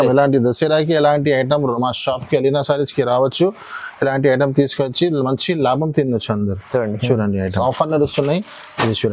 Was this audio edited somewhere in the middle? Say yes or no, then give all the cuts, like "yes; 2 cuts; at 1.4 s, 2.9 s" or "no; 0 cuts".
yes; 1 cut; at 7.5 s